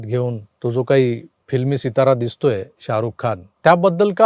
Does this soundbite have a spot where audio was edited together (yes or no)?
no